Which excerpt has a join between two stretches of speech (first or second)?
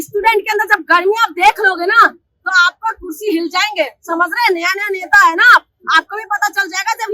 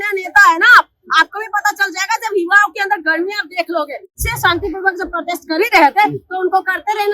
second